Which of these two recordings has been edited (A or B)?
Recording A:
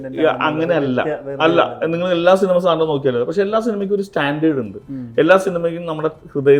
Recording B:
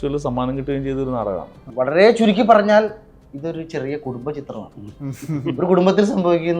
B